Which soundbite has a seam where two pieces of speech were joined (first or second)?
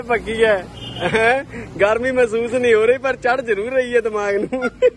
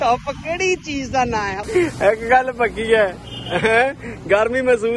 second